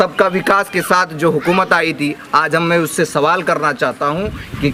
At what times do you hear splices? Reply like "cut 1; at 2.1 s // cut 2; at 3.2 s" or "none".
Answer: none